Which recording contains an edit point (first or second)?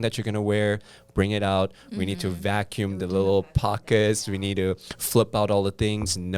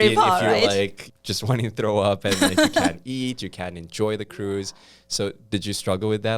second